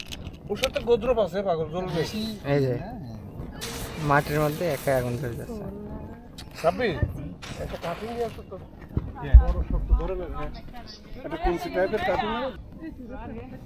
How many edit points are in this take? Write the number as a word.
one